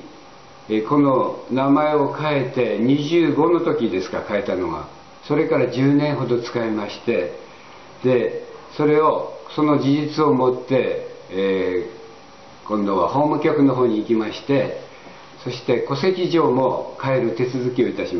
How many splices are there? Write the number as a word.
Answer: one